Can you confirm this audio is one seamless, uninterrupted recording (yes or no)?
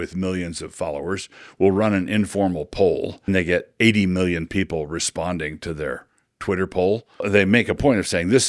no